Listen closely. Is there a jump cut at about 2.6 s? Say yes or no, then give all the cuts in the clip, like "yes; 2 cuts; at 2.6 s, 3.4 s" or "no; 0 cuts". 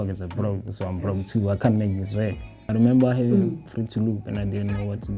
yes; 1 cut; at 2.6 s